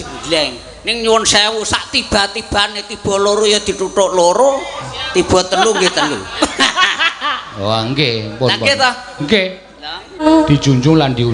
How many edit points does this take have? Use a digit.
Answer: 1